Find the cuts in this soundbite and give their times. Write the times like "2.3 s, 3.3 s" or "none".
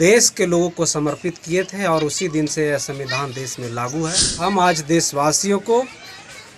4.3 s